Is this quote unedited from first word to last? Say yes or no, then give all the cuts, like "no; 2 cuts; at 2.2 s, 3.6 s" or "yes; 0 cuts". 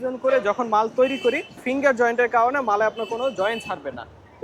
no; 1 cut; at 1.6 s